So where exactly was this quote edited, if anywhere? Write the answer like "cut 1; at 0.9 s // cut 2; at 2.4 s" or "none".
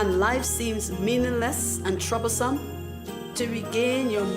cut 1; at 3.3 s